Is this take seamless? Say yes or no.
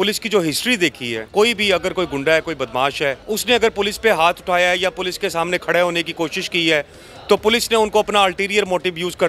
no